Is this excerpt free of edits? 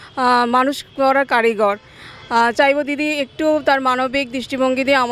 yes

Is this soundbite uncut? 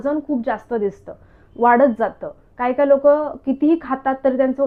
yes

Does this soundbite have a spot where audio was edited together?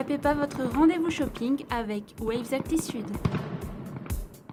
no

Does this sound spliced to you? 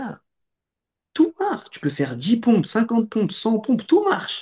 no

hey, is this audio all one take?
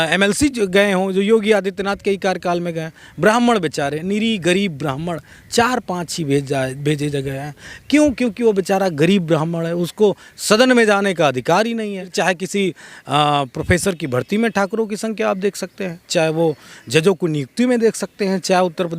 no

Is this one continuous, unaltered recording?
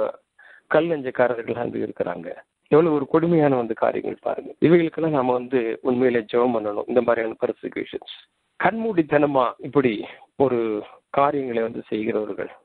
yes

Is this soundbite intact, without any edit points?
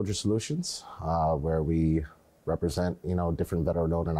yes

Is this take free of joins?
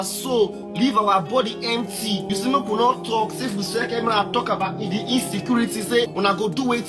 yes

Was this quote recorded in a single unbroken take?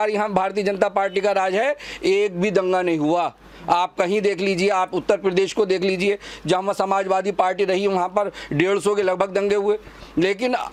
yes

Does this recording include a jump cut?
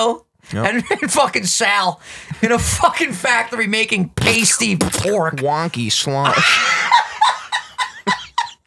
no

